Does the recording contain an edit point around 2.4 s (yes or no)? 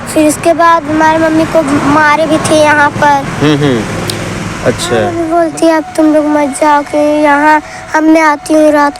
no